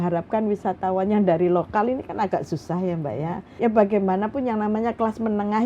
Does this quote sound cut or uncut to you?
cut